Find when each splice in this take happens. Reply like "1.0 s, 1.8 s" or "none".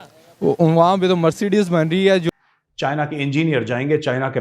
2.3 s